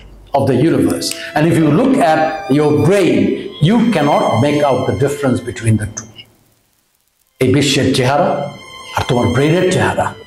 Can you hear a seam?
no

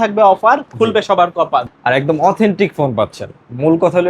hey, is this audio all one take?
no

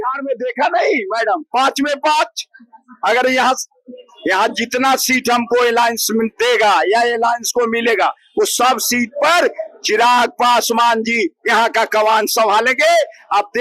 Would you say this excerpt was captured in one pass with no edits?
yes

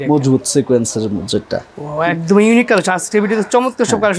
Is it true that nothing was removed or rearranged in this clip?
yes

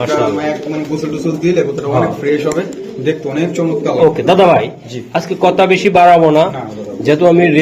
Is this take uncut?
yes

